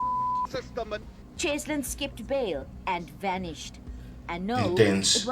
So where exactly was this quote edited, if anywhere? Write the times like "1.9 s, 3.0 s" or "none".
1.2 s